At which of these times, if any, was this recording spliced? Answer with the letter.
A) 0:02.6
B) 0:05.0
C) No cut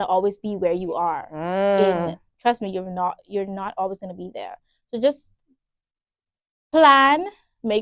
C